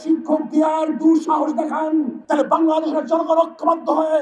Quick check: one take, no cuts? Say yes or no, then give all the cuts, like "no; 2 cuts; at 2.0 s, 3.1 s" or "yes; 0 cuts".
no; 1 cut; at 2.2 s